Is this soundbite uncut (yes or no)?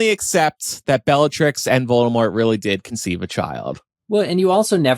yes